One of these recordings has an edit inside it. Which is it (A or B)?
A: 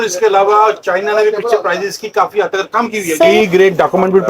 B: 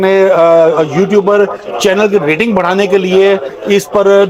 A